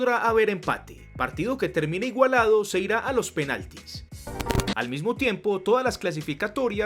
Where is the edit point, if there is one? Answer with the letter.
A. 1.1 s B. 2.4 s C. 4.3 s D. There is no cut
C